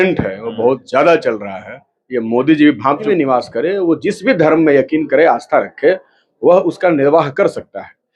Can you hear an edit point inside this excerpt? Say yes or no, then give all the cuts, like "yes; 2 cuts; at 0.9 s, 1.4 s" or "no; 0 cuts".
yes; 1 cut; at 3.0 s